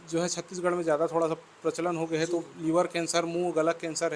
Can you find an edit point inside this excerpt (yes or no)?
no